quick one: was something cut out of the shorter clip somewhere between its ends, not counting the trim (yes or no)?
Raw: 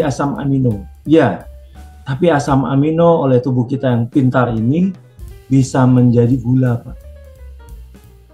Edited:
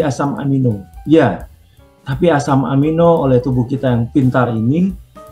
no